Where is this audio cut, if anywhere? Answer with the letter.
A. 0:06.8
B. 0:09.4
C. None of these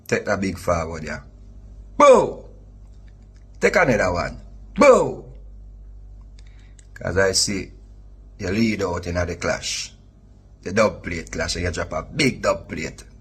C